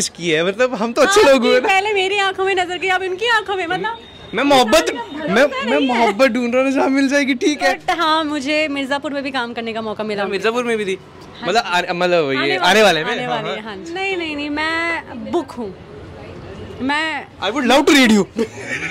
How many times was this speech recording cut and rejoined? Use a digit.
2